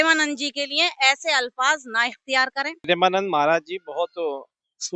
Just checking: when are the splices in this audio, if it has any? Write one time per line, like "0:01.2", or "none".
0:02.7